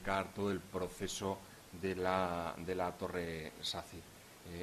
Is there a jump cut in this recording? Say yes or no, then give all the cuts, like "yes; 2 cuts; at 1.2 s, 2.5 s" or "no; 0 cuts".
no; 0 cuts